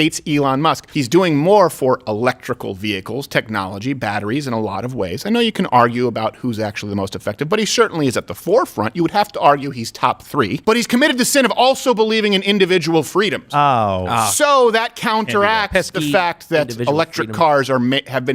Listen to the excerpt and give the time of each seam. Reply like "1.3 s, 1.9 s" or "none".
0.9 s, 10.6 s